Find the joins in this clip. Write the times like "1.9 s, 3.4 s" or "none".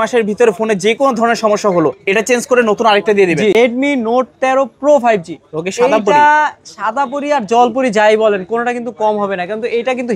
3.5 s